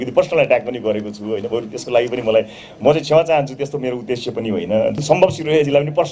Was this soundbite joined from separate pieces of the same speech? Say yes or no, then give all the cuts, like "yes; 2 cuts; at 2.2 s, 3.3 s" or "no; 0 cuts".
yes; 1 cut; at 5.0 s